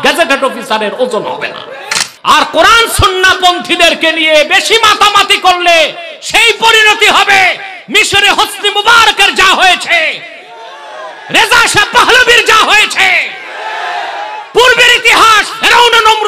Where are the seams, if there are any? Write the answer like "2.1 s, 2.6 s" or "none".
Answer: 1.8 s